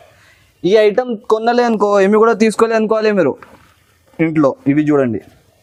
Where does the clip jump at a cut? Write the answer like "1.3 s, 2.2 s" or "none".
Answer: none